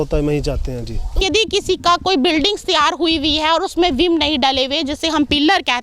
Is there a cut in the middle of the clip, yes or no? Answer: yes